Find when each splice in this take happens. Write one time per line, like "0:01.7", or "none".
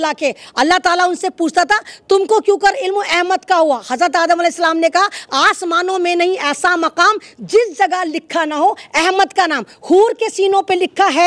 none